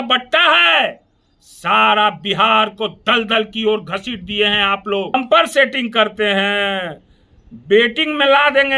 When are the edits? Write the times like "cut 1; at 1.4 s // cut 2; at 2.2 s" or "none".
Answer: cut 1; at 5.1 s

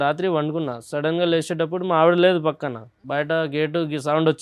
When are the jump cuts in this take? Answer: cut 1; at 3.0 s

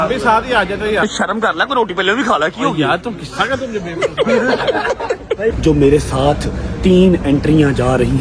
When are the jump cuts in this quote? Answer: cut 1; at 1.0 s // cut 2; at 5.6 s

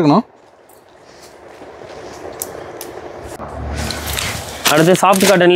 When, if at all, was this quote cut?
none

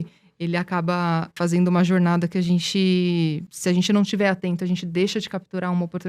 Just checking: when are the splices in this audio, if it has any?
cut 1; at 1.3 s // cut 2; at 3.5 s

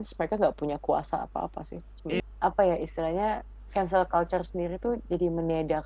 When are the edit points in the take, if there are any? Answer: cut 1; at 2.2 s

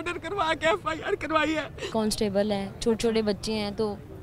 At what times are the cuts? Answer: cut 1; at 1.9 s

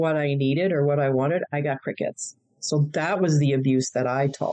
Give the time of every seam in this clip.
none

